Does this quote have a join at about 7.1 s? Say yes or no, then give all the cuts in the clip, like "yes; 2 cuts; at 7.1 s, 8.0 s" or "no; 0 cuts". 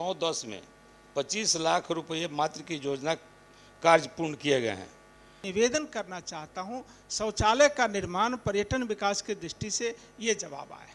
no; 1 cut; at 5.4 s